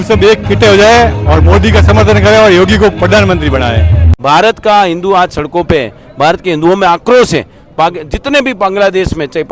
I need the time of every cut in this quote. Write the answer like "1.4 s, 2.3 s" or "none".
4.0 s